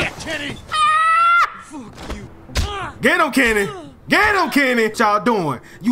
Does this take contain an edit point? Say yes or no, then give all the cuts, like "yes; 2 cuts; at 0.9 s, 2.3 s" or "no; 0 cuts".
yes; 2 cuts; at 2.3 s, 4.9 s